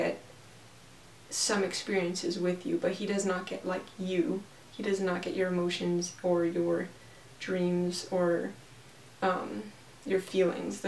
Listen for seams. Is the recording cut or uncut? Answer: uncut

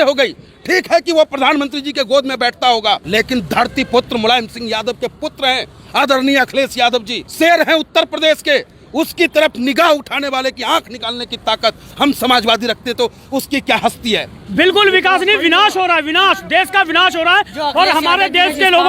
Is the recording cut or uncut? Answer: cut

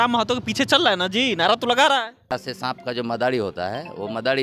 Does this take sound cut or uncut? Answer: cut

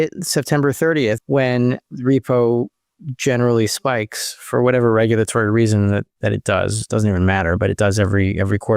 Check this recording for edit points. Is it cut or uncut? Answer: cut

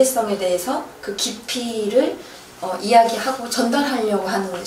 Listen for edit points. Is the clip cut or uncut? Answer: uncut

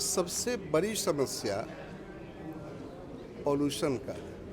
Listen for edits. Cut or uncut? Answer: uncut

